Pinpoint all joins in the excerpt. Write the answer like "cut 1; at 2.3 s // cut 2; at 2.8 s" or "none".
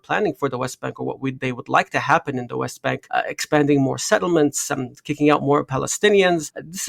none